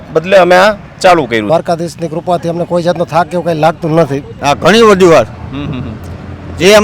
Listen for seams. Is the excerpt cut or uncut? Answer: cut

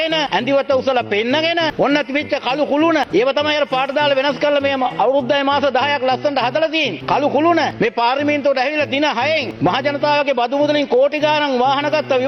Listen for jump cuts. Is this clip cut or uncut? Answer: uncut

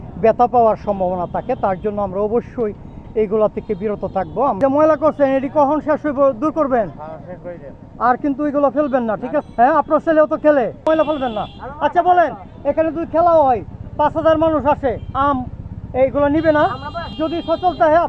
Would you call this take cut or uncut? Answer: cut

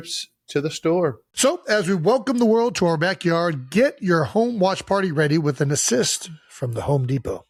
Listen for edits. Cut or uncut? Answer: uncut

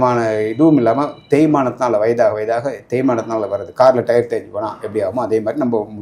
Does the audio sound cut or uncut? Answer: uncut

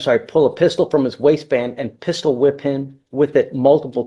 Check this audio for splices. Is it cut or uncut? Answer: uncut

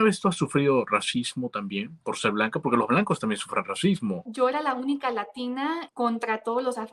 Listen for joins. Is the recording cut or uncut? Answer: cut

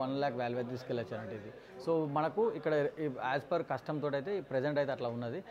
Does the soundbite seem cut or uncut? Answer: uncut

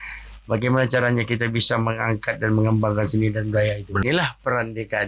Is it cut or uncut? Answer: cut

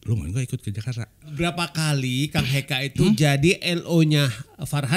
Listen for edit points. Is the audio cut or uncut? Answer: cut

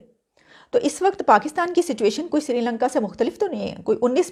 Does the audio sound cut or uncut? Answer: uncut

